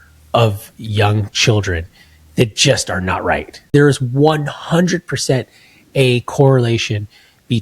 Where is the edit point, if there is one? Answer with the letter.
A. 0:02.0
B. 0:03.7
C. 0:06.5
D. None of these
B